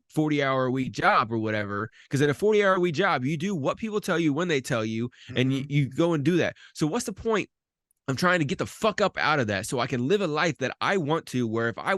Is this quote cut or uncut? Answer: uncut